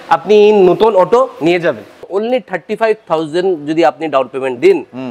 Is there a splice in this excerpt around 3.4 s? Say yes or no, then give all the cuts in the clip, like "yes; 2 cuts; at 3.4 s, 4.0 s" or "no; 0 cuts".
no; 1 cut; at 2.0 s